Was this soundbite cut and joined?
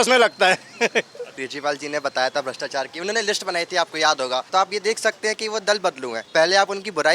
yes; 3 cuts; at 1.4 s, 4.5 s, 6.2 s

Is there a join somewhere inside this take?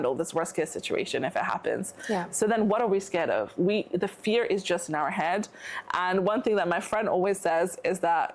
no; 0 cuts

